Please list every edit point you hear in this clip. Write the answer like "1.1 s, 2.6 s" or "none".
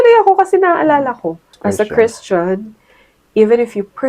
1.5 s